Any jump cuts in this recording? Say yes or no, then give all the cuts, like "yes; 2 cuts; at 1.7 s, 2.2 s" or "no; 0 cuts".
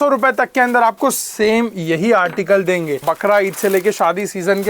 yes; 1 cut; at 3.1 s